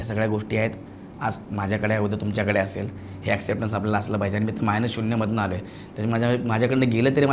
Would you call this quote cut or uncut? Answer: uncut